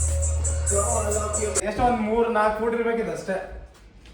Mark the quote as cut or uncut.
cut